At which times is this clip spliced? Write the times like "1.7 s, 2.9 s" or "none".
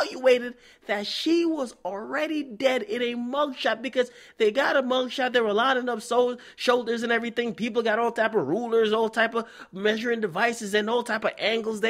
7.0 s